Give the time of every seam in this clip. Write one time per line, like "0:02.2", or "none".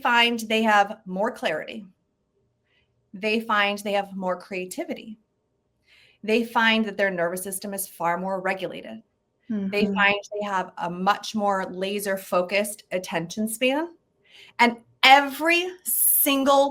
none